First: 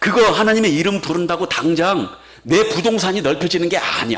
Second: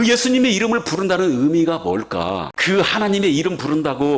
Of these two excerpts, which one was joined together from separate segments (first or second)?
second